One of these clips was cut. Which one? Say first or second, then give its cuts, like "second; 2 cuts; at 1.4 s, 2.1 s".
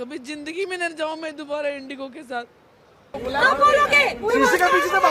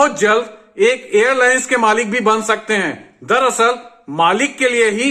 first; 1 cut; at 3.2 s